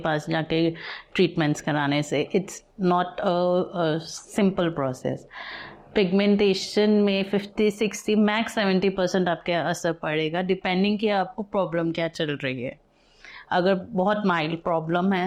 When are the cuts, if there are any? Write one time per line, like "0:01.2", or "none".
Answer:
none